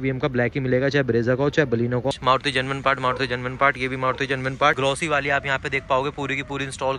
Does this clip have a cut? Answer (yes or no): yes